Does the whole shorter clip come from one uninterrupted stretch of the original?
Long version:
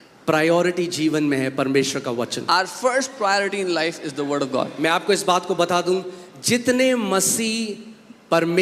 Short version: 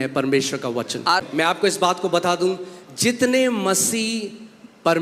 no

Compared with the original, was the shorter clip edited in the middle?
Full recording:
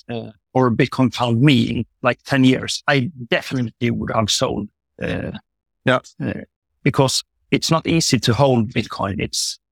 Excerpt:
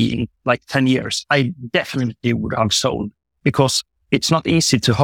yes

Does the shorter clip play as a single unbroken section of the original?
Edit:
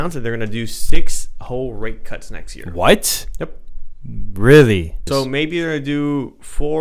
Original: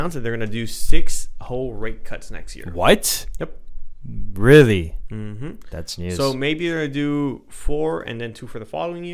no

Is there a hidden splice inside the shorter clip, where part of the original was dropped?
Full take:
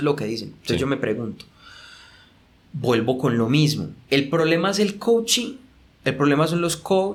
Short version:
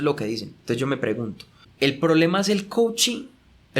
yes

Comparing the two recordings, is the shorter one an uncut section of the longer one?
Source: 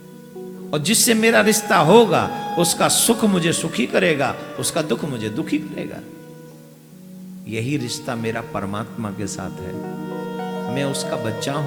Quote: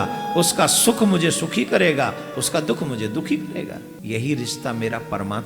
no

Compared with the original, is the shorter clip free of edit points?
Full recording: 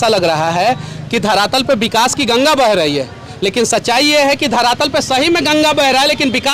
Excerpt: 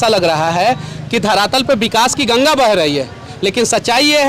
yes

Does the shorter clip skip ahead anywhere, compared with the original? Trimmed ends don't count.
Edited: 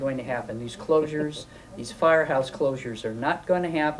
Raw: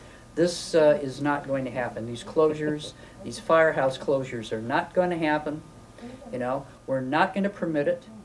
no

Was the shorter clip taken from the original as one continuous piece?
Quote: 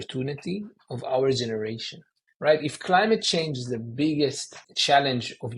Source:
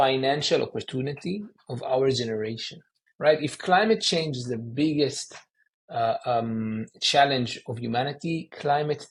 no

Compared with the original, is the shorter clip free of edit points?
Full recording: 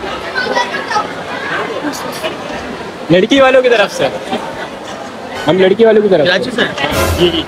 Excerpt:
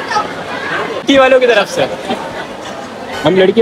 no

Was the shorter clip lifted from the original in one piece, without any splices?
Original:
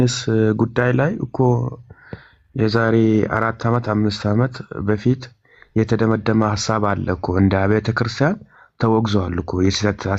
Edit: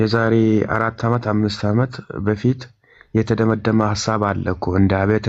yes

